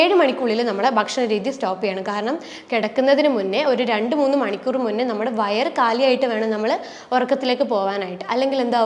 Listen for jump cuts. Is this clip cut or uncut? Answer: uncut